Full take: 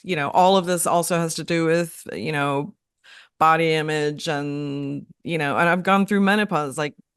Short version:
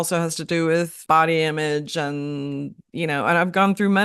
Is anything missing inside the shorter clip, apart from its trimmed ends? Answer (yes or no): yes